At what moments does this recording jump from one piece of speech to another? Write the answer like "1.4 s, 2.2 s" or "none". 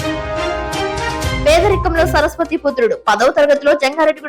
1.4 s